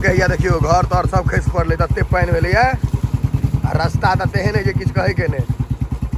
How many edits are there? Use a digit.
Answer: 0